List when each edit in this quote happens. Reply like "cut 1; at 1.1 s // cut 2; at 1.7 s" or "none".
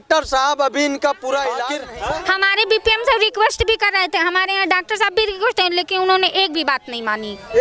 cut 1; at 1.8 s